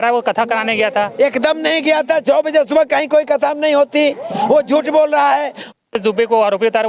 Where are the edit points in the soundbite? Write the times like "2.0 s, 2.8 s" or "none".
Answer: 5.6 s